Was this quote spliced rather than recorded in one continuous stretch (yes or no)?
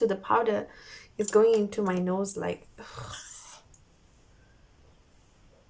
no